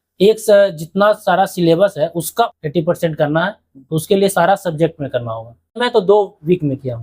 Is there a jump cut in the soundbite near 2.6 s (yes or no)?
yes